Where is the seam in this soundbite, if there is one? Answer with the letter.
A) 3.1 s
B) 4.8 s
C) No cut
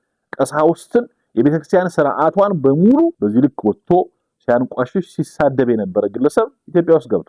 A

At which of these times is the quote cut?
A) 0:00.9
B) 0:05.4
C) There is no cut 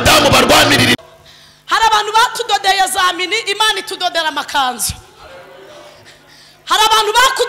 A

